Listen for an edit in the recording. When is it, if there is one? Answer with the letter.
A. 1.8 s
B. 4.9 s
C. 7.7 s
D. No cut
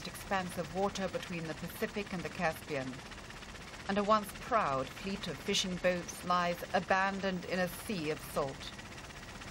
A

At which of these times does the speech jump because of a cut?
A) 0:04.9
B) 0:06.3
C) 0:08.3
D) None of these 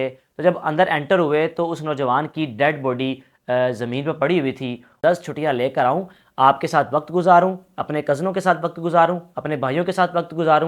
A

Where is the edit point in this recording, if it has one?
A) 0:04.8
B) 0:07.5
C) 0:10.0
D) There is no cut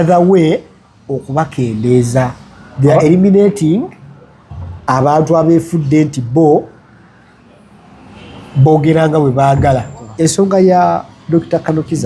C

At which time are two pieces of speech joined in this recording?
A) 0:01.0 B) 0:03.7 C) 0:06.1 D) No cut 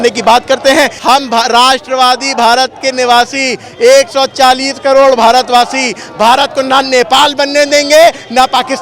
A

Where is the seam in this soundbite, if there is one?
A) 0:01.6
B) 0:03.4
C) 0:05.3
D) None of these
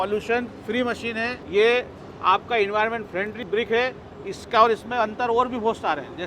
B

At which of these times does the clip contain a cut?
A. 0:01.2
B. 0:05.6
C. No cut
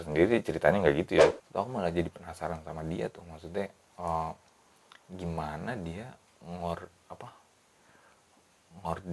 A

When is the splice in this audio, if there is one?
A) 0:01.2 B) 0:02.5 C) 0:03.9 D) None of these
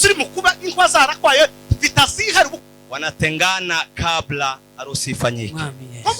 B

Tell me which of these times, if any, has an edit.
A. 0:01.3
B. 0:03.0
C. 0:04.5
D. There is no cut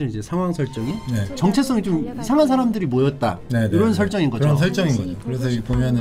A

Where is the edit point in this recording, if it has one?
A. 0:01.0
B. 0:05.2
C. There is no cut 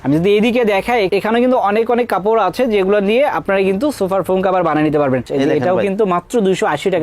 B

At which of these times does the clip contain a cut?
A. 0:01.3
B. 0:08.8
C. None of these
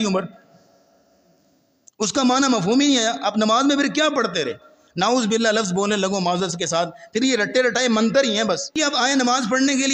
B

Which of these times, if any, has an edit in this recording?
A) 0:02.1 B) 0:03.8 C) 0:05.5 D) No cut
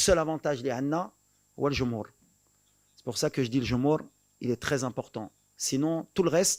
D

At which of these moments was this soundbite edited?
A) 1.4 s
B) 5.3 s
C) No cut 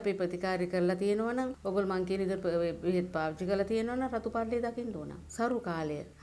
B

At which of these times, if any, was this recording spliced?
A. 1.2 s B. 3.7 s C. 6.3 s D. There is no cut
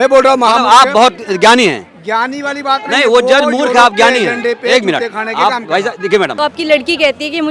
C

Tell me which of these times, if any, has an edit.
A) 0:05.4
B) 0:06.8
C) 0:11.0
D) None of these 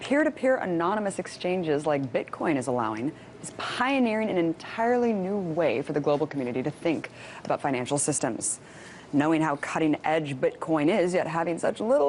B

